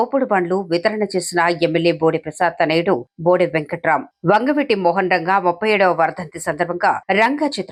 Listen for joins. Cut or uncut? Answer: uncut